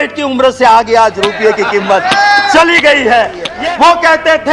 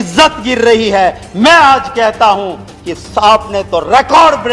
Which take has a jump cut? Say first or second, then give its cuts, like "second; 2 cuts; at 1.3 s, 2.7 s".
first; 1 cut; at 3.5 s